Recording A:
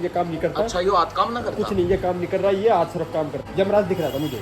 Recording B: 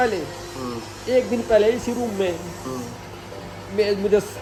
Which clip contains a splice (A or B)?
A